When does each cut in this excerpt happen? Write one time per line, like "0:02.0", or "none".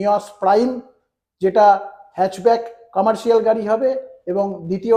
none